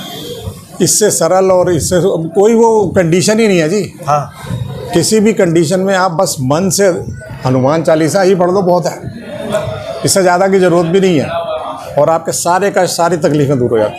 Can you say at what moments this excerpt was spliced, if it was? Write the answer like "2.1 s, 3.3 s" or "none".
none